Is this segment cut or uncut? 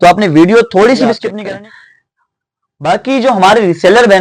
cut